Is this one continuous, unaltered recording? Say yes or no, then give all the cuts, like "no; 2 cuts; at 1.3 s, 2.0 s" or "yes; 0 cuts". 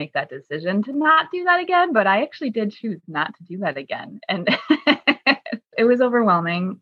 no; 1 cut; at 5.7 s